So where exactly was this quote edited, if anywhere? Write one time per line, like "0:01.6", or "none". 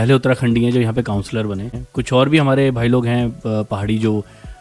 none